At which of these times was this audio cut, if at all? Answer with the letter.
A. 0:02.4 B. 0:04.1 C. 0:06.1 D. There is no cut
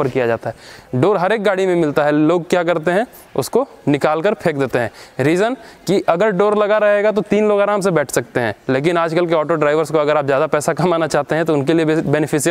D